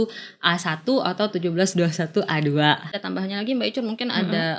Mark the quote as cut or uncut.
cut